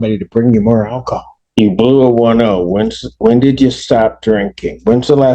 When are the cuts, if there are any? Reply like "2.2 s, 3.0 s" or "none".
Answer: 1.3 s